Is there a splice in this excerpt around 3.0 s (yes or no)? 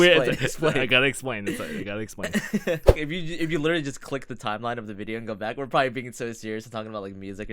yes